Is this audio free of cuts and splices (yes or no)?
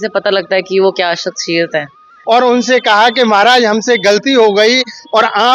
no